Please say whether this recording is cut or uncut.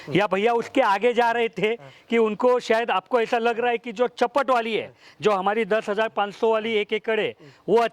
uncut